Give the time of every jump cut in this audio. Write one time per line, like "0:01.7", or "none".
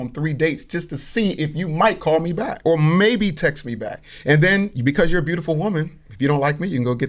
0:02.5
0:04.7